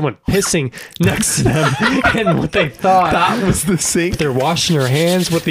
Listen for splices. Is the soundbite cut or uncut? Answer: cut